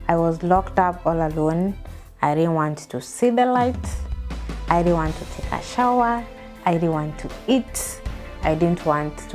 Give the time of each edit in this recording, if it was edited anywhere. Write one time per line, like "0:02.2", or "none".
0:08.4

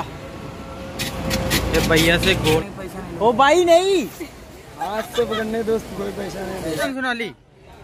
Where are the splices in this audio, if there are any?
0:02.4
0:06.9

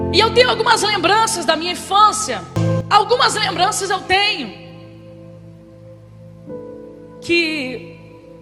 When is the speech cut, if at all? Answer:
0:02.5

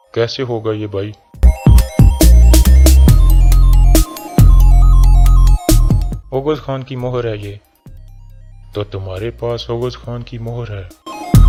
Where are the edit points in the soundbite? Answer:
none

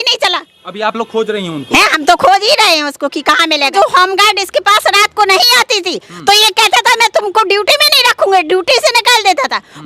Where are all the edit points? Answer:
0:03.7

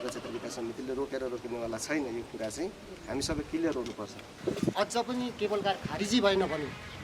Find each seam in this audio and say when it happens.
0:04.4

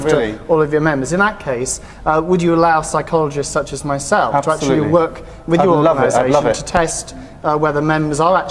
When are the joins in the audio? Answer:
0:03.3

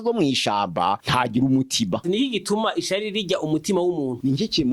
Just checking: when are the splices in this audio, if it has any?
0:01.0
0:02.0

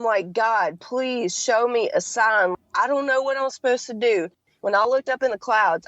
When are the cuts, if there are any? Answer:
0:04.5

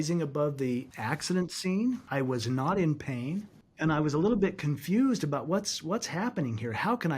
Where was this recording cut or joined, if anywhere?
0:00.9
0:02.0

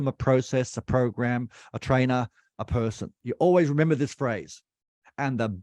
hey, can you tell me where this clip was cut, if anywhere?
0:03.1

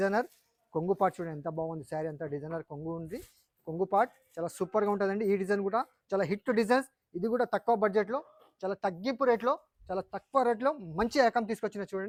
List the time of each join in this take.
none

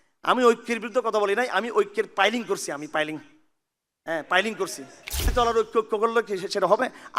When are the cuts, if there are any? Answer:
0:05.3

